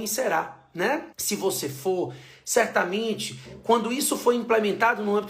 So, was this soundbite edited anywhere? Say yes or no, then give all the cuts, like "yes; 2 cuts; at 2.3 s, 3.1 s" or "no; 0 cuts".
yes; 1 cut; at 1.1 s